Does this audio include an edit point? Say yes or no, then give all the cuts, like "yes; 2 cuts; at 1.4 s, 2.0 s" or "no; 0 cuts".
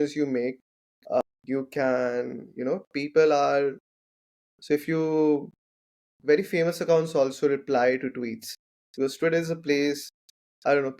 yes; 1 cut; at 1.2 s